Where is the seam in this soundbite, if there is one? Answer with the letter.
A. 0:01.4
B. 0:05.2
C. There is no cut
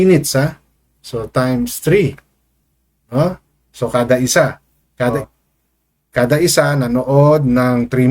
B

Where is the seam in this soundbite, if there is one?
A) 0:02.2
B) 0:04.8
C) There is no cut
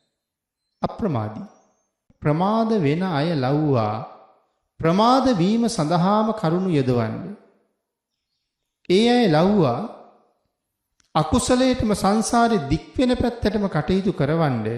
A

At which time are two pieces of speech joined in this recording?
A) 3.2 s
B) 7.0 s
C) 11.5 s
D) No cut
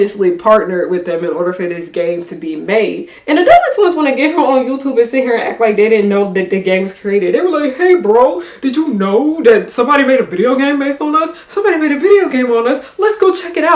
D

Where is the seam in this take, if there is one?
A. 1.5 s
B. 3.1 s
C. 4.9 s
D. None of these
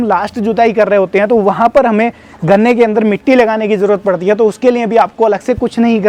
D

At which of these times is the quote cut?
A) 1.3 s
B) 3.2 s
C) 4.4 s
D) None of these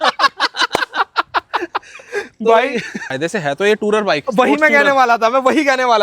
B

